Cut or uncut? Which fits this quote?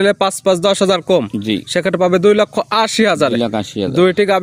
uncut